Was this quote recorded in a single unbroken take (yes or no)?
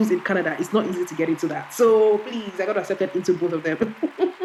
yes